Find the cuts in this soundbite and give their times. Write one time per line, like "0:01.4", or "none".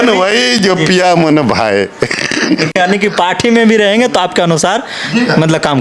none